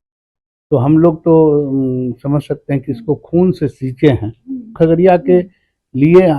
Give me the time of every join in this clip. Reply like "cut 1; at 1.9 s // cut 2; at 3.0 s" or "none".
cut 1; at 4.7 s